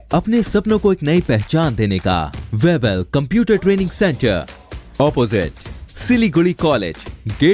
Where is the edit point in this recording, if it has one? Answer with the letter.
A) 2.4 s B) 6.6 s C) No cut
A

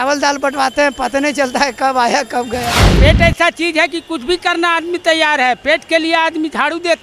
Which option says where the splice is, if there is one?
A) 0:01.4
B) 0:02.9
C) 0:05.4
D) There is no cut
B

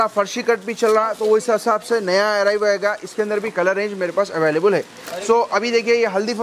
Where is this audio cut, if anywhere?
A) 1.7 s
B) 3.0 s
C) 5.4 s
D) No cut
D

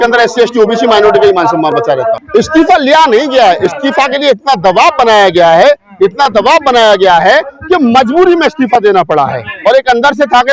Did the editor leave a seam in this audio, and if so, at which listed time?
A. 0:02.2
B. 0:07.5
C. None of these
A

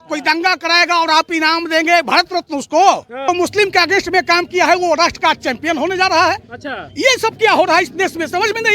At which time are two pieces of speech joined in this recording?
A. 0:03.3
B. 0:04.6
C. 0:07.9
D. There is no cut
A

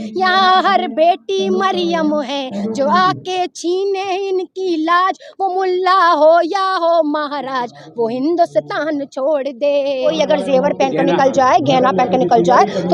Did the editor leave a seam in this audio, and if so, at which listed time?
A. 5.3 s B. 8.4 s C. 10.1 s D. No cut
C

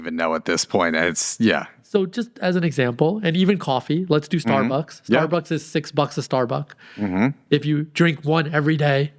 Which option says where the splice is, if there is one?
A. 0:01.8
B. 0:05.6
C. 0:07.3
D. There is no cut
D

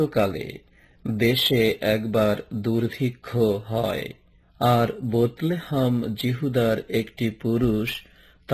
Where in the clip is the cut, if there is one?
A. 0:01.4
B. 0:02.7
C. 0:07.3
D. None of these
B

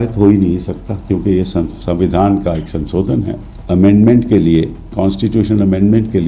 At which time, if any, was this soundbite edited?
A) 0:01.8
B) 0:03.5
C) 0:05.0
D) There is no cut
B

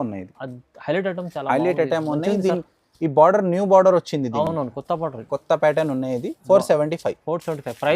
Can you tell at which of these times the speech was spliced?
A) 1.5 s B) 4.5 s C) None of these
C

